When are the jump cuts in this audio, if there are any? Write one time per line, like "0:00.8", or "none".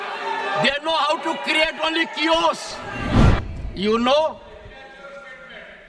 0:03.3